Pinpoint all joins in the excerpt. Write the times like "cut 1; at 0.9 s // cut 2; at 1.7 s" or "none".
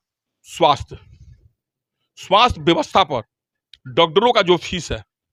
none